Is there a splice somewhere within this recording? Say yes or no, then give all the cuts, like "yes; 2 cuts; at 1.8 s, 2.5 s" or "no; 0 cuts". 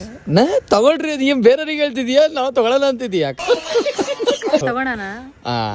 no; 0 cuts